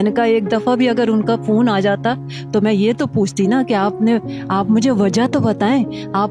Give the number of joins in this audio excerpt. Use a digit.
0